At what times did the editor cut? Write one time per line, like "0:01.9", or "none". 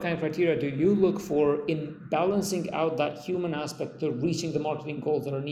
none